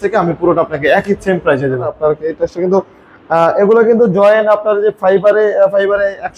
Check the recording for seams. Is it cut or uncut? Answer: cut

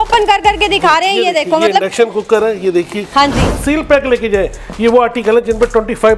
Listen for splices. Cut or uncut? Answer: cut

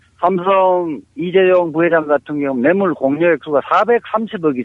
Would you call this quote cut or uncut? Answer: cut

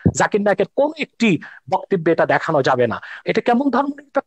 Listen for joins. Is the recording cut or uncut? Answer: cut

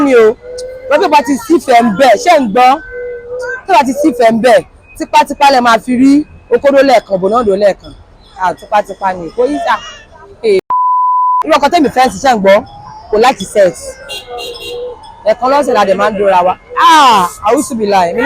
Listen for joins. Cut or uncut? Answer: cut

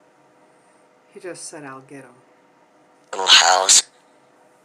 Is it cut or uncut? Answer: uncut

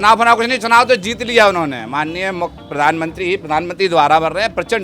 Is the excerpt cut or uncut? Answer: uncut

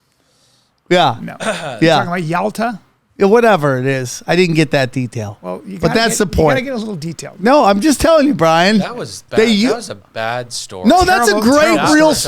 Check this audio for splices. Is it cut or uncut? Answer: uncut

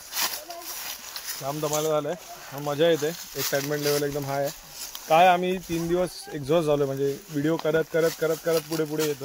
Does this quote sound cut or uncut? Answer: uncut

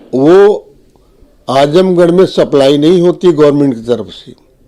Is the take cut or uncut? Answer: uncut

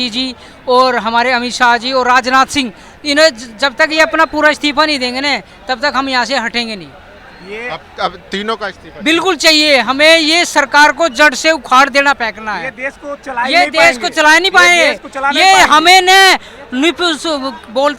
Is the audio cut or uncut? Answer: uncut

